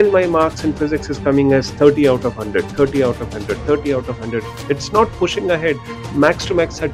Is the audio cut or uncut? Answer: uncut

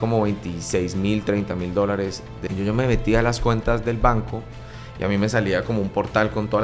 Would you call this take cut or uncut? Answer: cut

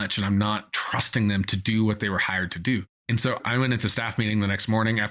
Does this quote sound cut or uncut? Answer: cut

